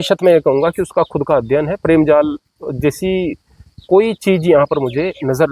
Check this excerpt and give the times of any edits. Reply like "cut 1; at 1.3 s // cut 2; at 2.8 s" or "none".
none